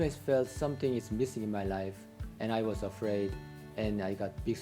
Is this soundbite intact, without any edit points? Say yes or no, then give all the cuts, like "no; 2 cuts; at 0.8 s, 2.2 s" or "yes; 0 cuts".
yes; 0 cuts